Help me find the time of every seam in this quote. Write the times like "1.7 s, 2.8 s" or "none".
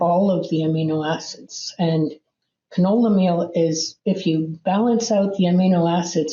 3.9 s